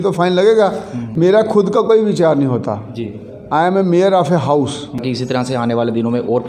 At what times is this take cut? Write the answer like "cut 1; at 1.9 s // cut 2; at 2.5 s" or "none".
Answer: cut 1; at 1.0 s // cut 2; at 5.0 s